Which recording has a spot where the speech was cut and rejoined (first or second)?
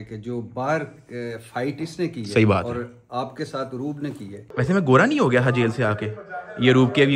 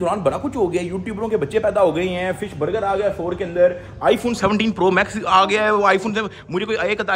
first